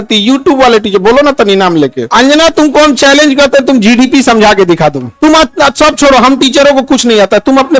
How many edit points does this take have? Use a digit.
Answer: 1